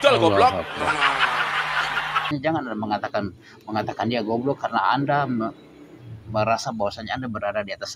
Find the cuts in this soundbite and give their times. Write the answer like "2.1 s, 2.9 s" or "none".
2.3 s